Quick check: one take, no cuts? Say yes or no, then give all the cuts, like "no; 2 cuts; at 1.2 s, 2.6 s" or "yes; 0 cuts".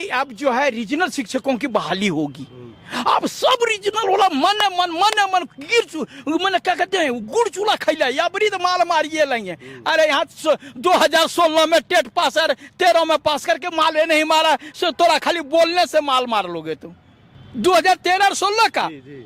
yes; 0 cuts